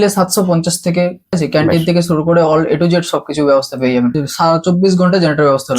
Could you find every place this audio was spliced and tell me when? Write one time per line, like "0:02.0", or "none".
0:01.4
0:04.2

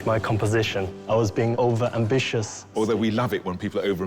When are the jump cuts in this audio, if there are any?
0:01.2
0:02.7

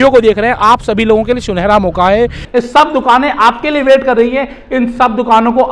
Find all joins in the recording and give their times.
0:02.4

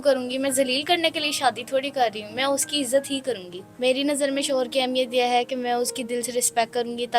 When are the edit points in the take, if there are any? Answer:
0:03.5

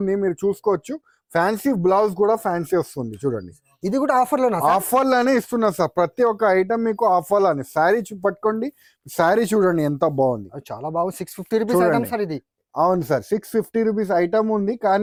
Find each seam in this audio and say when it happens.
none

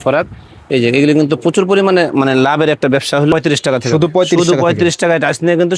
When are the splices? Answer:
0:03.3

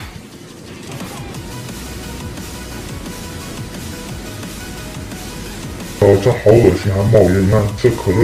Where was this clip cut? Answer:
0:05.2

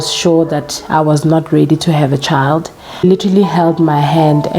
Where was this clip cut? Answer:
0:03.0

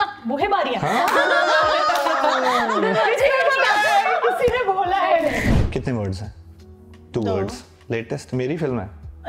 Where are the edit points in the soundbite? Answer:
0:05.5

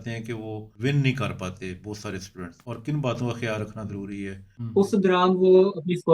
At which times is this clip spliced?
0:04.4

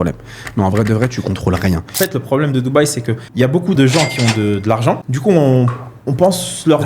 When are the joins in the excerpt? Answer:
0:01.9
0:03.7
0:05.1

